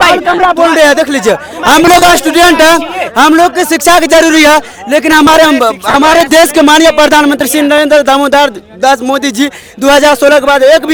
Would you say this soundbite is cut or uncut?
uncut